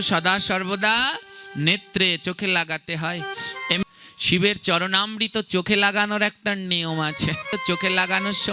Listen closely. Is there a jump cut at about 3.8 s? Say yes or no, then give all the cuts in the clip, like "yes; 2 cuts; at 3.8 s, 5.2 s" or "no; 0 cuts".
yes; 2 cuts; at 3.8 s, 7.5 s